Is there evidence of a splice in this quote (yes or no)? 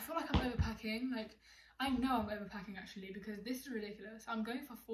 no